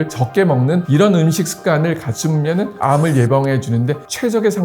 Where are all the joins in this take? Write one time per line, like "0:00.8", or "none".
0:02.8